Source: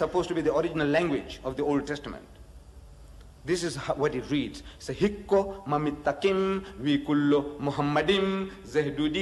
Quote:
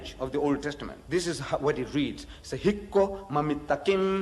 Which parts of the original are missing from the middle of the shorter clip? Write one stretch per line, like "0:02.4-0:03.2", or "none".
0:02.2-0:03.3